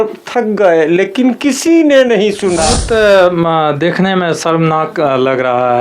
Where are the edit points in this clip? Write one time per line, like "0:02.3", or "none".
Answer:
0:02.7